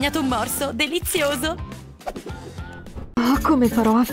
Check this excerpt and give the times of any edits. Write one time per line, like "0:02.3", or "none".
0:03.1

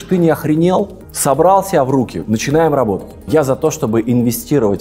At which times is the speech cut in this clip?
0:01.0
0:03.1

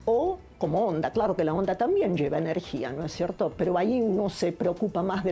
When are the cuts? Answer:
0:04.1

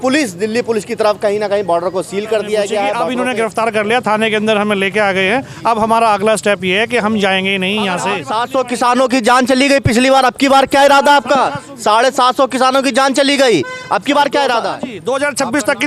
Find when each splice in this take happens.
0:03.0
0:08.2
0:14.9

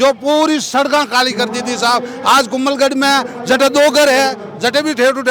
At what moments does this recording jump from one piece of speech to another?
none

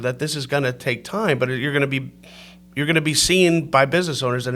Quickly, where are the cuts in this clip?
none

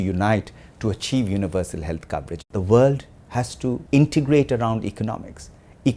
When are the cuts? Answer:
0:02.3
0:03.8

